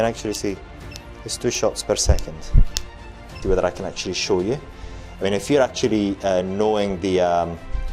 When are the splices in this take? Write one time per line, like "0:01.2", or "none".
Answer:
0:03.3